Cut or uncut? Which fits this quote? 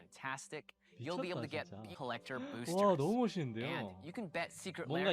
cut